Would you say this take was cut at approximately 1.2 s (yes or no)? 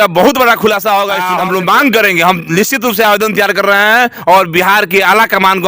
yes